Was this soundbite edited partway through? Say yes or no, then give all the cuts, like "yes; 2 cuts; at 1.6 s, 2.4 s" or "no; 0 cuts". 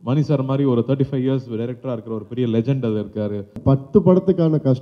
yes; 1 cut; at 3.6 s